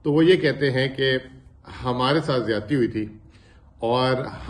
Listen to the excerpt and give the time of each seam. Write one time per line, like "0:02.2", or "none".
none